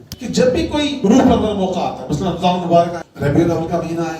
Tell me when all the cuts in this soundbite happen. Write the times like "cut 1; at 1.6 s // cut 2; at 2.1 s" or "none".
cut 1; at 1.0 s // cut 2; at 3.0 s